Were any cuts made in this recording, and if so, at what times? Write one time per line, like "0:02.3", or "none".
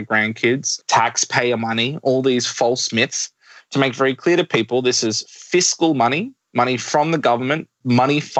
none